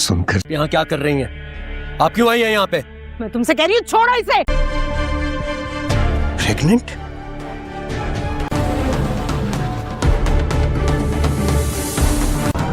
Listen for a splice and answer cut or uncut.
cut